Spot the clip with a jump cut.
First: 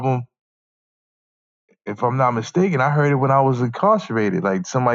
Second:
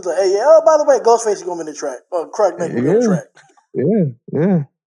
second; 1 cut; at 2.7 s

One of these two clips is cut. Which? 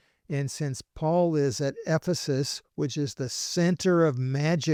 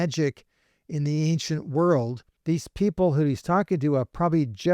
second; 1 cut; at 2.3 s

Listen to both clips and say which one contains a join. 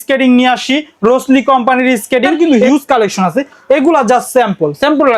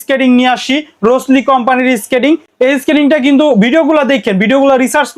first; 1 cut; at 2.3 s

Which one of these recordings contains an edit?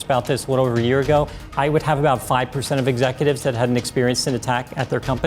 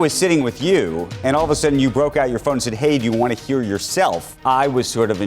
second; 2 cuts; at 1.1 s, 4.3 s

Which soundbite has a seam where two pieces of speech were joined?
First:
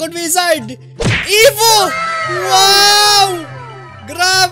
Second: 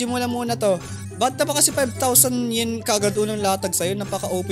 second; 1 cut; at 1.0 s

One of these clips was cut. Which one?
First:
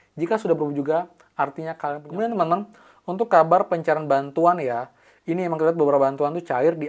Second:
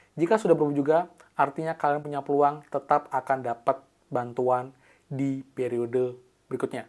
first; 1 cut; at 2.0 s

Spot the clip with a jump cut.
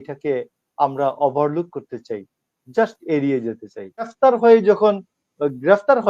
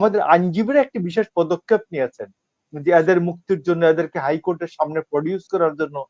first; 1 cut; at 4.1 s

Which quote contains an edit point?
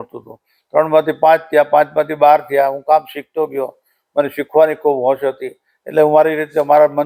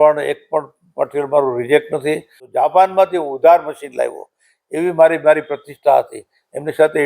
second; 1 cut; at 2.4 s

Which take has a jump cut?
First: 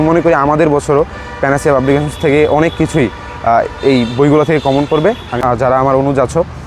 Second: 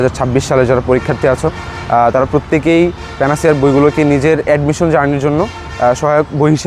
first; 1 cut; at 5.4 s

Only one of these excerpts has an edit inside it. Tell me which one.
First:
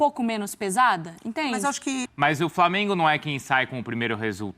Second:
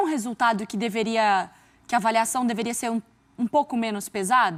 first; 1 cut; at 2.1 s

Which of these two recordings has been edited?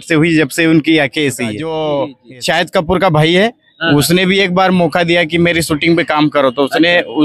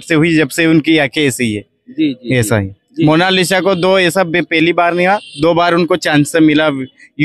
first; 1 cut; at 1.6 s

